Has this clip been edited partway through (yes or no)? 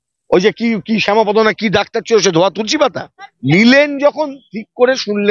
yes